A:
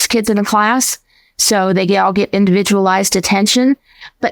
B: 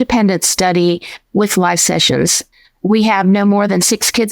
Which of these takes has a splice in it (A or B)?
B